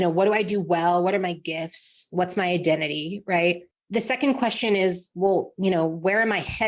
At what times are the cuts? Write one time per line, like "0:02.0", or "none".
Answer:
0:03.7